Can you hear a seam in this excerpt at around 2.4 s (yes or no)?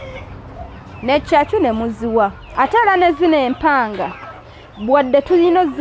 yes